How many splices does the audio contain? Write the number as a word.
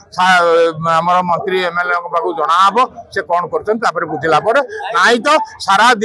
one